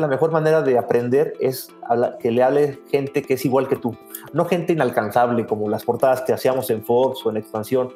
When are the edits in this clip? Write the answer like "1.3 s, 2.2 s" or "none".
none